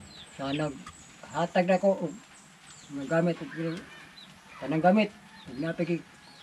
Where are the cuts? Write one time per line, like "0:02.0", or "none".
none